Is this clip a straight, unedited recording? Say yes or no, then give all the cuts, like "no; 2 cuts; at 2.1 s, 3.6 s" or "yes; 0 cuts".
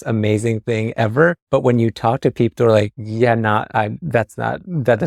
no; 3 cuts; at 1.4 s, 3.0 s, 4.0 s